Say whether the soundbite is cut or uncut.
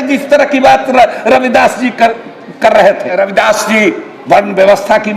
cut